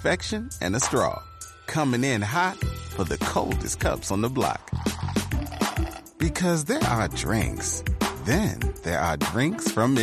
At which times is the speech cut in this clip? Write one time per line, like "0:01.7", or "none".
none